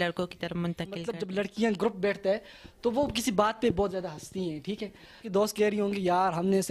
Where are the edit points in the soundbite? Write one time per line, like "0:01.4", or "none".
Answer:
0:01.0
0:05.2